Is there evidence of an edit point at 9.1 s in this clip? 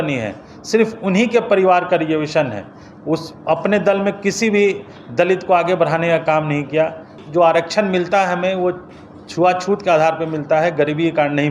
no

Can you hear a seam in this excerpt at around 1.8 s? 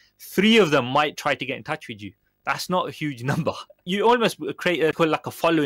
no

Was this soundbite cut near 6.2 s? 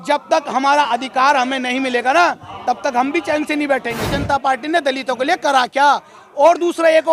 no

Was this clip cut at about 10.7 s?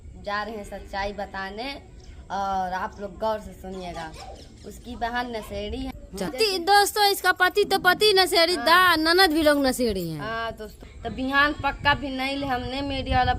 yes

